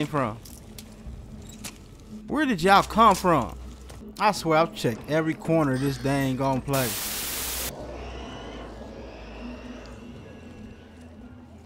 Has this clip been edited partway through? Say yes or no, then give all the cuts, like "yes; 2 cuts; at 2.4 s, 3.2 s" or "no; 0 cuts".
no; 0 cuts